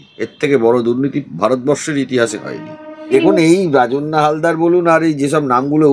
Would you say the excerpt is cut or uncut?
cut